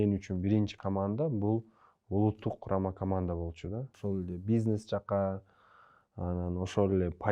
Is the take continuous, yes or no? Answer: no